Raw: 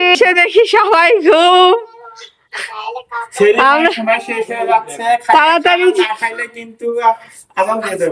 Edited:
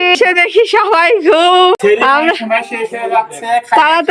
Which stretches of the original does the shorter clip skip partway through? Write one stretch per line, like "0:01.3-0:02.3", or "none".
0:01.8-0:03.4